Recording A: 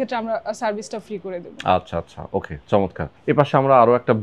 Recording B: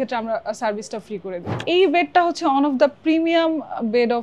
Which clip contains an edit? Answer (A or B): B